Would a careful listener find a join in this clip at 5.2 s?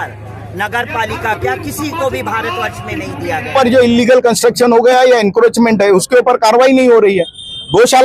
no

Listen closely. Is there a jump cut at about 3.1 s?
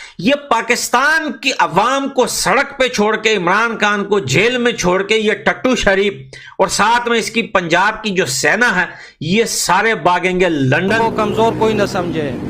no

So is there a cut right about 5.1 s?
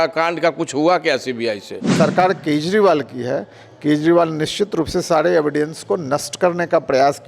no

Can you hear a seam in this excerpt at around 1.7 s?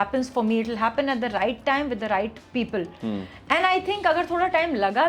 no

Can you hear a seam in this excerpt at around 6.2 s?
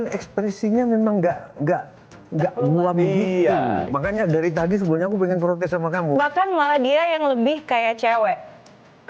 yes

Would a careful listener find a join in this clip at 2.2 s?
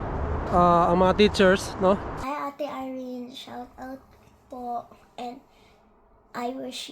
yes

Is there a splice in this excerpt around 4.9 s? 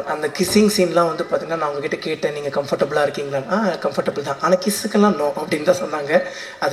no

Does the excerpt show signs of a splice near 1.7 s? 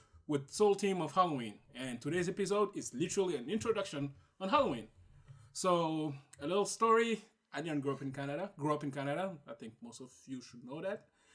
no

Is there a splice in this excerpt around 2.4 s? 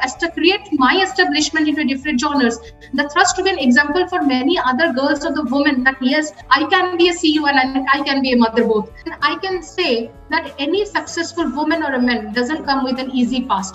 no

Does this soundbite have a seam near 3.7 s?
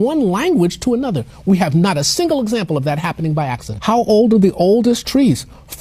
yes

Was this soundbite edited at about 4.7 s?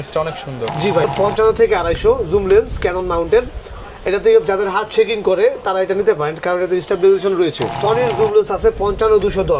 no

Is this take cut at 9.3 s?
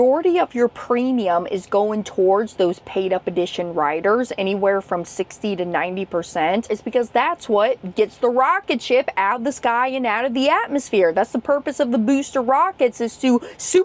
no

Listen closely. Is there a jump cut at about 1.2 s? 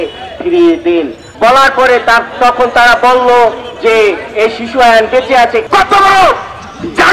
yes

